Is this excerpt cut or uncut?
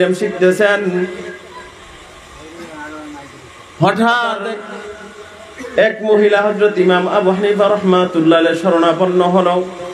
cut